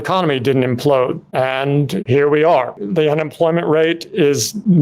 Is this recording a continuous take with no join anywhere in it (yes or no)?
no